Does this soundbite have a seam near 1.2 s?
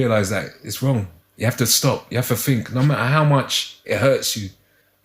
yes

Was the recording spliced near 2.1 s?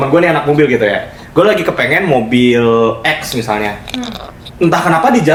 no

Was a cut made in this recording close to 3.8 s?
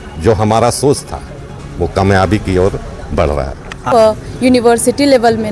yes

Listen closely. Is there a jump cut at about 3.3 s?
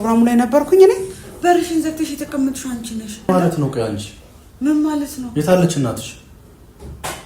yes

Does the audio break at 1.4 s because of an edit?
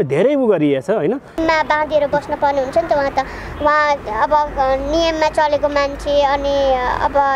yes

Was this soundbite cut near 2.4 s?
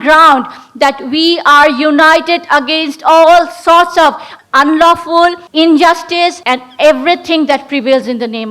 no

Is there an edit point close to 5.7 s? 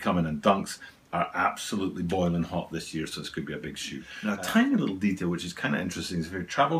no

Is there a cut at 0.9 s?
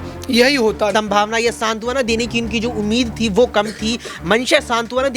yes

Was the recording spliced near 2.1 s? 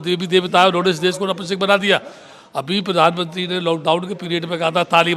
no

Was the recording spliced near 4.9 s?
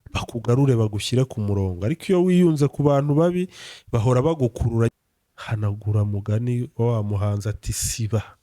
yes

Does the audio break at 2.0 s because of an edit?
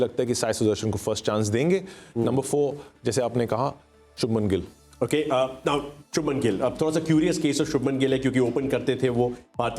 no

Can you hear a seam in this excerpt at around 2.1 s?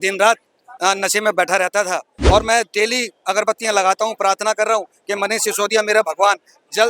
yes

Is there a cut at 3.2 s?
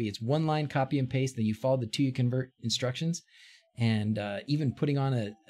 no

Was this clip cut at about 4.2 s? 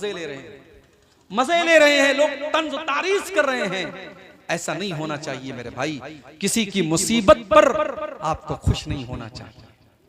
no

